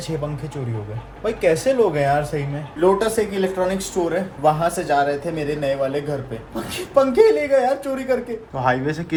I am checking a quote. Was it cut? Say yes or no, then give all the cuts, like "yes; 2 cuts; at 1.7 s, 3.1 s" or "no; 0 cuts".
no; 0 cuts